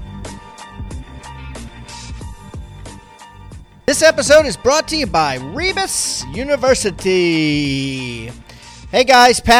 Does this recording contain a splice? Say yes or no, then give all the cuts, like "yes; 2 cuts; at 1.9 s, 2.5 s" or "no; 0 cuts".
yes; 2 cuts; at 1.8 s, 3.7 s